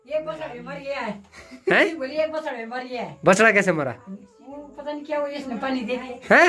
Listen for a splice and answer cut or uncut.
uncut